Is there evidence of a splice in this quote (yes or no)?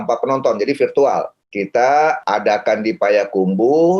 yes